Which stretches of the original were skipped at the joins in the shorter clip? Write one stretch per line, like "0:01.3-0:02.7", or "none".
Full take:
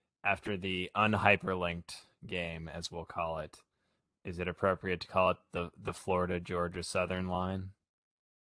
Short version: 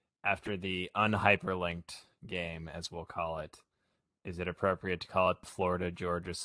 0:05.5-0:05.9